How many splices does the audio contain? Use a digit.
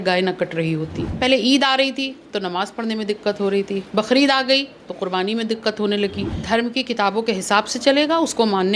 2